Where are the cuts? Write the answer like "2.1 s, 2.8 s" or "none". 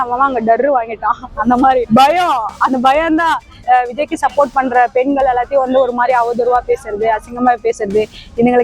3.6 s